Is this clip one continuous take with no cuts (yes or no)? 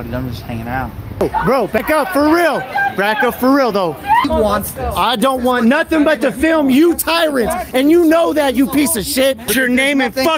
no